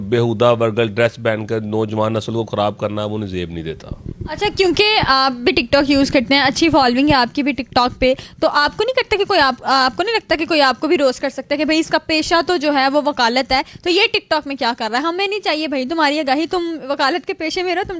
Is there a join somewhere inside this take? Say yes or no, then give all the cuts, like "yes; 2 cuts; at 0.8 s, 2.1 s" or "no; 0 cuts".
no; 0 cuts